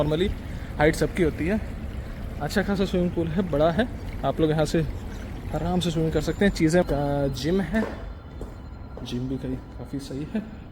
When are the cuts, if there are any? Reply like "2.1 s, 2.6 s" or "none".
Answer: 6.8 s